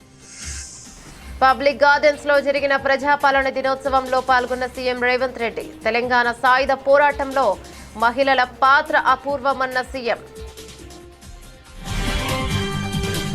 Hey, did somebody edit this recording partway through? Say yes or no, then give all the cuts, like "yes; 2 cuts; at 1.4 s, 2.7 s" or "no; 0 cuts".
yes; 2 cuts; at 1.4 s, 10.3 s